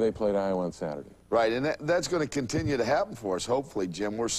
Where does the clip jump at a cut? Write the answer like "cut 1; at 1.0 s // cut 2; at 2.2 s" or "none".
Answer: cut 1; at 3.2 s